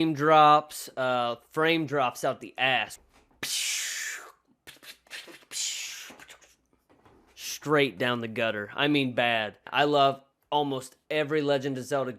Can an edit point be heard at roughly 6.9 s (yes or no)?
no